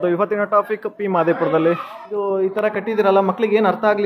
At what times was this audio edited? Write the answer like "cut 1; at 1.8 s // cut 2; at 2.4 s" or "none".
cut 1; at 2.0 s

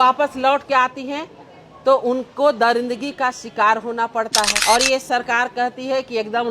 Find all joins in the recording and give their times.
cut 1; at 4.6 s

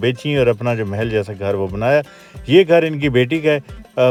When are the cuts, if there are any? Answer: none

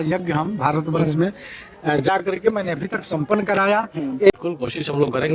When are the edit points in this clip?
cut 1; at 4.3 s

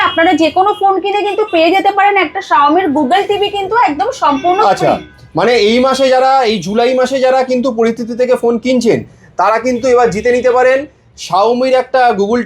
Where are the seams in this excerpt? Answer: none

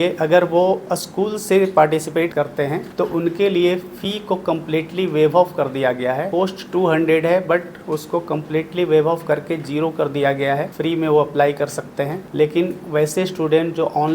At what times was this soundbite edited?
cut 1; at 2.4 s // cut 2; at 6.3 s // cut 3; at 10.7 s // cut 4; at 12.2 s

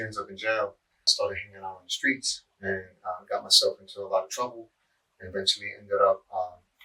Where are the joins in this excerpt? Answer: cut 1; at 1.1 s

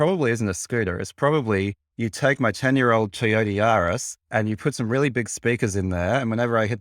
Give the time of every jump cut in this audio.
cut 1; at 1.8 s // cut 2; at 4.1 s

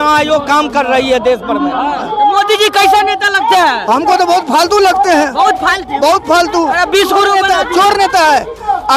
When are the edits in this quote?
cut 1; at 2.1 s

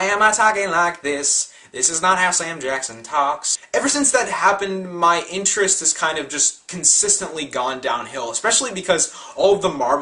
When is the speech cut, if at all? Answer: cut 1; at 4.1 s

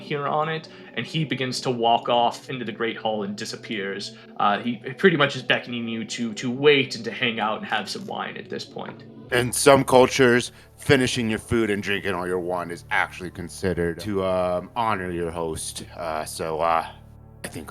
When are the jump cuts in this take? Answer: cut 1; at 2.5 s // cut 2; at 9.2 s // cut 3; at 14.0 s

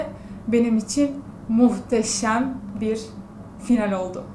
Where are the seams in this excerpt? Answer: none

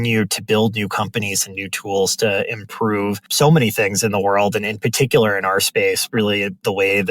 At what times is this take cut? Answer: cut 1; at 3.2 s

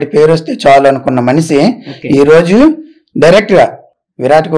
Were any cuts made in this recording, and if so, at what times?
none

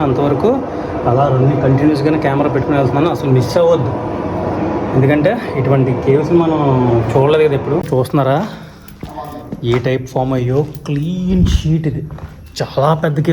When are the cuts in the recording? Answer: cut 1; at 7.8 s

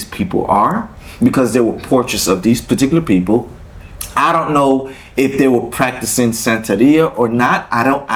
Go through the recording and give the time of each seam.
none

